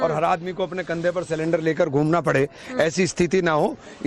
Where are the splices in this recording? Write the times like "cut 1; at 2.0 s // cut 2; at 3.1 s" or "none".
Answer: cut 1; at 1.9 s

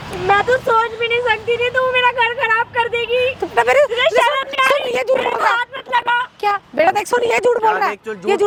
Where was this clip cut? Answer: none

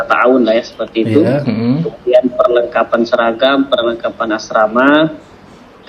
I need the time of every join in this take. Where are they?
none

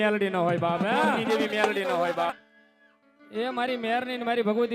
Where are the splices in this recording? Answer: cut 1; at 2.3 s

